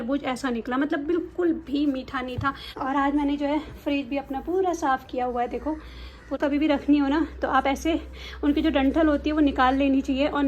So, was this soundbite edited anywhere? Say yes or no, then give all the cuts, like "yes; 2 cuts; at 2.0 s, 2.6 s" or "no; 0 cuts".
yes; 2 cuts; at 2.7 s, 6.3 s